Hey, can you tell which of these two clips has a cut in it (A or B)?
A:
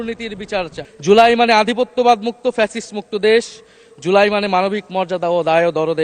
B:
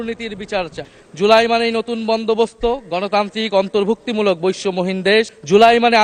A